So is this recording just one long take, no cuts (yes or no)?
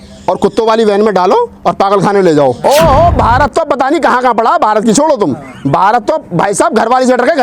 no